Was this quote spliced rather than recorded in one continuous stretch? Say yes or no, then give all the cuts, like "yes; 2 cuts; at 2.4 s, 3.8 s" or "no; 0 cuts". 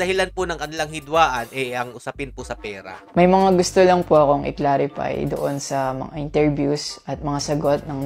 no; 0 cuts